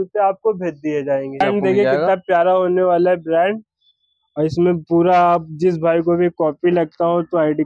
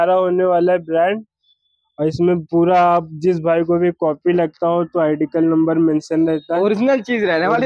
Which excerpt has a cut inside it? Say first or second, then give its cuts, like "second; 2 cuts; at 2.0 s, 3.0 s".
first; 1 cut; at 1.4 s